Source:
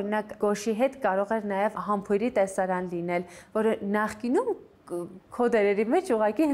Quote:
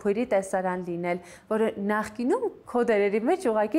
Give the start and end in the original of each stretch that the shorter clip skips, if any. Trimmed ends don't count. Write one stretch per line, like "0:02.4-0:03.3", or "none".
0:04.7-0:05.3